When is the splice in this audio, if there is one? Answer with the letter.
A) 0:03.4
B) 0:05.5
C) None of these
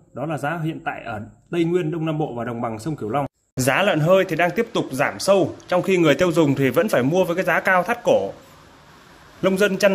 A